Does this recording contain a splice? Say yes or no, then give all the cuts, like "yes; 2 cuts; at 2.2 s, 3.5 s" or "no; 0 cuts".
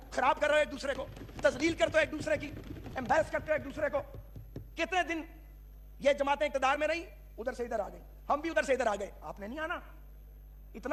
no; 0 cuts